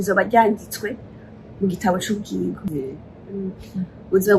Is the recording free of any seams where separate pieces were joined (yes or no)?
no